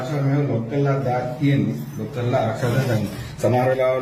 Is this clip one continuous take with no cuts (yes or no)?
yes